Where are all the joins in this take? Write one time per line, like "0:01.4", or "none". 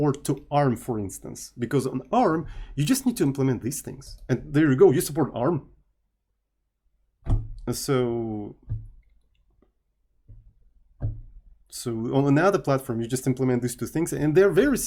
none

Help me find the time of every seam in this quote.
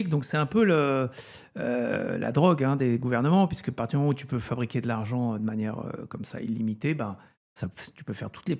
none

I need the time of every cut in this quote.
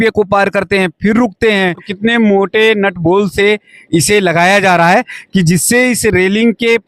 0:01.9

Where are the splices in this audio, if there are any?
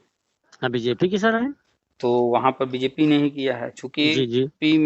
none

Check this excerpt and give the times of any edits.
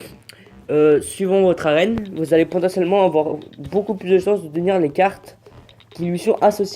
0:04.9

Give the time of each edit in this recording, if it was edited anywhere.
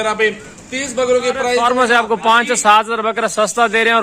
0:01.6

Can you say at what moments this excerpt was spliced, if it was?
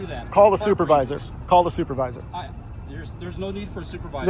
none

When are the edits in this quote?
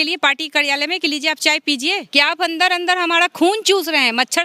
0:02.1

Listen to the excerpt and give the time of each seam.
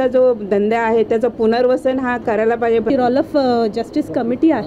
0:02.9

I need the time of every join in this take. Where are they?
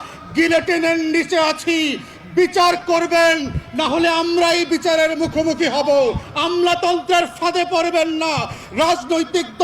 0:06.2

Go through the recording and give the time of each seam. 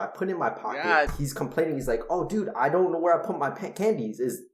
0:01.1

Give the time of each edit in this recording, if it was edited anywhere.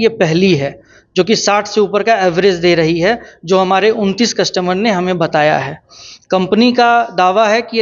none

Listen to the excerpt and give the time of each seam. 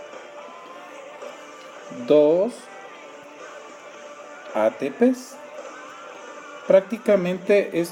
0:05.1

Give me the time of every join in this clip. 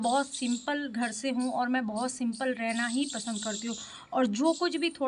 none

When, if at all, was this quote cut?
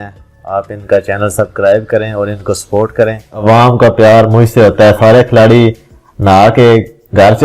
0:03.4

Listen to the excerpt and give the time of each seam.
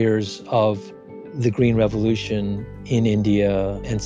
none

